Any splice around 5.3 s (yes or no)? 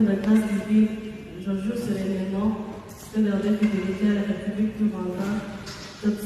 no